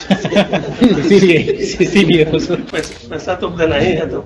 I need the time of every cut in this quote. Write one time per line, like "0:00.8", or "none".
0:02.7